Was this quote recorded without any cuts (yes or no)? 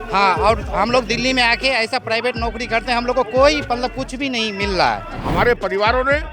no